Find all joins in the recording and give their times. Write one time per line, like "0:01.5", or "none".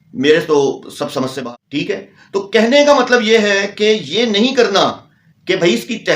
0:01.4